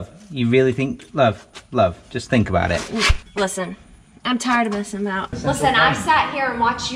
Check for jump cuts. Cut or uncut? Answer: cut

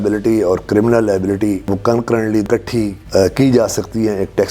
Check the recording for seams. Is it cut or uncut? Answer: cut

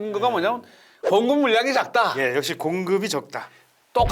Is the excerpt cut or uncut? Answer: uncut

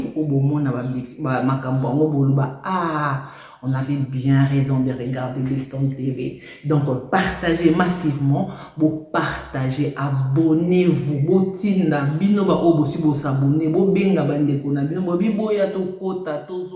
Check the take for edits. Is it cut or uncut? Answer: uncut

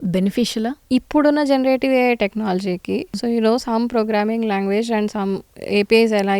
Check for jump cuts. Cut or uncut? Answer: cut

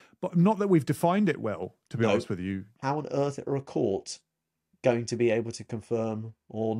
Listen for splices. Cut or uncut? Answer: cut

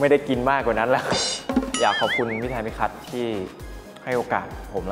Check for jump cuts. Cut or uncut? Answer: cut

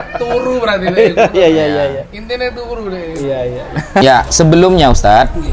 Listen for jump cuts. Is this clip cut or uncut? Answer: cut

